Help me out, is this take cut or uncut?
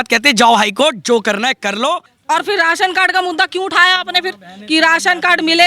cut